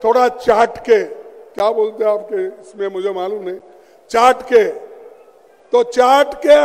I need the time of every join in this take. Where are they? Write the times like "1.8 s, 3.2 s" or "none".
none